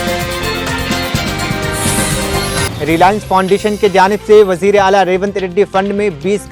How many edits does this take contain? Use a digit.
1